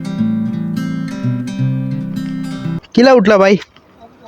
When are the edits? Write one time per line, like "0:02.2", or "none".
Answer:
0:02.8